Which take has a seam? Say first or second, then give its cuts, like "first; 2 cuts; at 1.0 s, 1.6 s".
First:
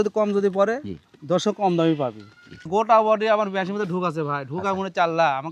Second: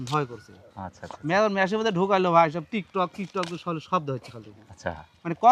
first; 1 cut; at 2.7 s